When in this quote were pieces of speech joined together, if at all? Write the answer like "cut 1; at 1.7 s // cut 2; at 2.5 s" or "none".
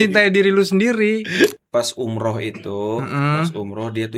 cut 1; at 1.6 s

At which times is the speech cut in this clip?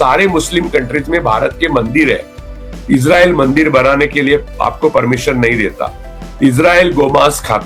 none

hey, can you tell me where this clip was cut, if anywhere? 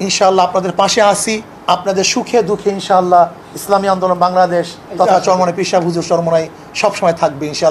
cut 1; at 1.5 s // cut 2; at 4.8 s

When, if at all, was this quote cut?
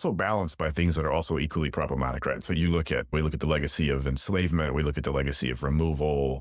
none

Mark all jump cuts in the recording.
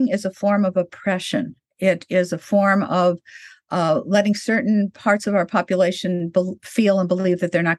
none

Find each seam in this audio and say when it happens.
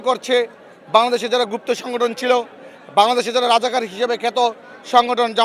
none

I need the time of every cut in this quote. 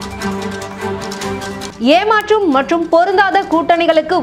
none

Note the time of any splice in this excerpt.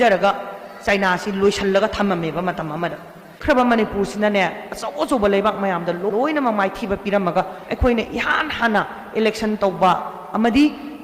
cut 1; at 3.4 s

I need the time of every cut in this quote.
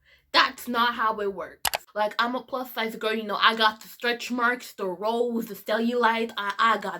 cut 1; at 1.8 s

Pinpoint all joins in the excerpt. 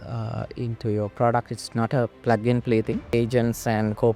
cut 1; at 3.1 s

